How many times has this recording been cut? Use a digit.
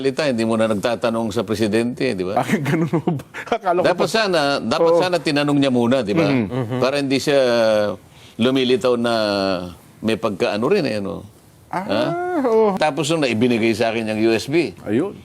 1